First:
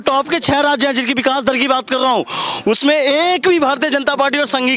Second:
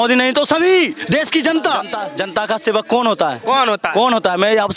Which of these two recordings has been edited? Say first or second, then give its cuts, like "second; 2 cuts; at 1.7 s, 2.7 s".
second; 1 cut; at 2.0 s